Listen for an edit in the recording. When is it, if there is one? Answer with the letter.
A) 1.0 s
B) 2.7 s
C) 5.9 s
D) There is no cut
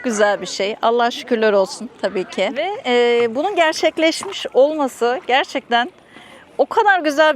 B